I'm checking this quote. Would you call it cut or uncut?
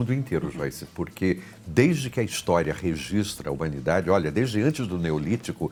uncut